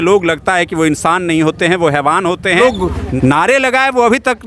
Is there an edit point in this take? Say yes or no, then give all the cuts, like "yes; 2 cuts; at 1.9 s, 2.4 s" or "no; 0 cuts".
yes; 1 cut; at 2.9 s